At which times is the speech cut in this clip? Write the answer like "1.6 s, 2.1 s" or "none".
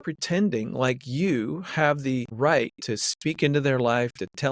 2.3 s